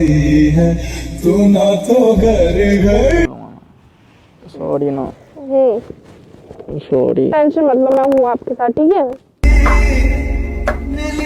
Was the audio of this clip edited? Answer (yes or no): yes